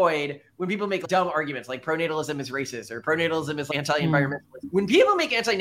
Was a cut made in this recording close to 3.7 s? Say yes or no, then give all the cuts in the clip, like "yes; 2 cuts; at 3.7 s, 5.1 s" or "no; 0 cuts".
yes; 3 cuts; at 1.0 s, 3.7 s, 4.5 s